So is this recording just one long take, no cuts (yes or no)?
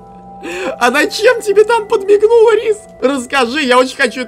no